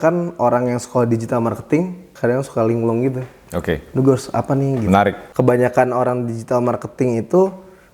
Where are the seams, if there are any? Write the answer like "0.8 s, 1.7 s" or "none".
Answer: 2.1 s, 5.2 s